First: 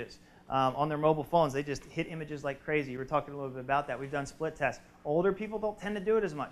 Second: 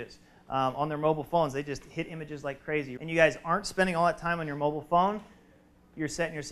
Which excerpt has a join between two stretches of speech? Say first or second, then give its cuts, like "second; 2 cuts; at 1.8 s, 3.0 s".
second; 1 cut; at 3.0 s